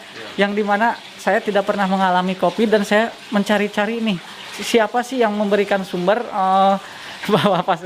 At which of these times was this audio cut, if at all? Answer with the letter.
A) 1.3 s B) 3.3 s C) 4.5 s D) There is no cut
C